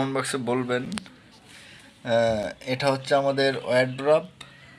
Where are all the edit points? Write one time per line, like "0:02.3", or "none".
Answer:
none